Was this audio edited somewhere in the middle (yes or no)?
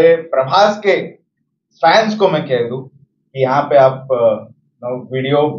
no